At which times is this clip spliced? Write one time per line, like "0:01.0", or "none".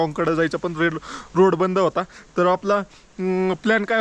none